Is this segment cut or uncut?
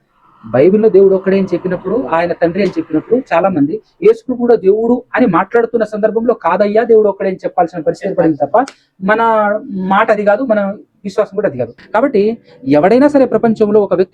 cut